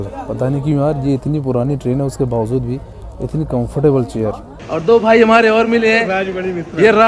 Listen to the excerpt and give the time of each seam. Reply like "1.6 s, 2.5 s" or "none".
4.7 s